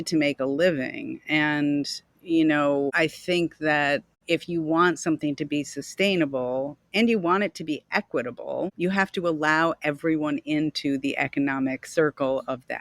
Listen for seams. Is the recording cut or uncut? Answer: cut